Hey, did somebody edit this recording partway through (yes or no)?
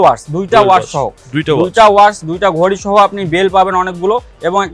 no